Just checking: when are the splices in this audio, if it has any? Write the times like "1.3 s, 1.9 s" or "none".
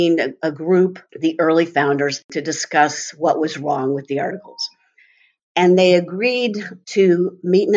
1.1 s, 2.2 s